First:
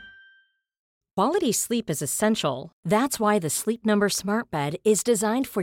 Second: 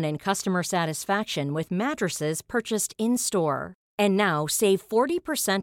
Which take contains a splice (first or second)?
first